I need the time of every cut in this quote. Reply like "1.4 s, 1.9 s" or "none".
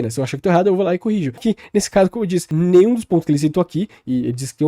1.3 s, 2.5 s